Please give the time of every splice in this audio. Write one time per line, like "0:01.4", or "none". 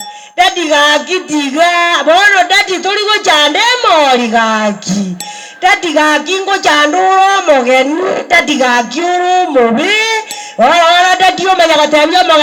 none